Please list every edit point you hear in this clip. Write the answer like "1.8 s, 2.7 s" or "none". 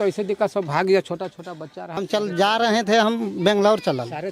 2.0 s